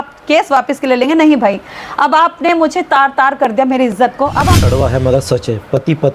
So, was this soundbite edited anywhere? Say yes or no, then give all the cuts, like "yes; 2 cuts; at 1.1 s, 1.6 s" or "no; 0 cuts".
yes; 1 cut; at 4.6 s